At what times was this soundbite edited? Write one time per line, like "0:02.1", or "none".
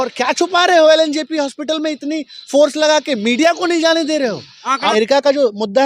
0:04.9